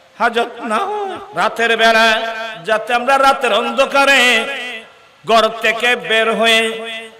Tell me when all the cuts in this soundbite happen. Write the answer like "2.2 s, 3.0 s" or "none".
1.2 s